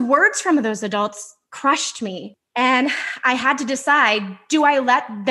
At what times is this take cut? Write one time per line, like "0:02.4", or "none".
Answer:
0:02.4